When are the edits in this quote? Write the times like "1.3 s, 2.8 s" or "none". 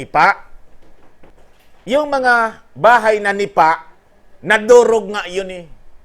1.3 s